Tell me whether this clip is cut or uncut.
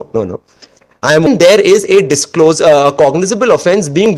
cut